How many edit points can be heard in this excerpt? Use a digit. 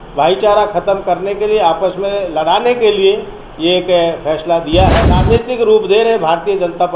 1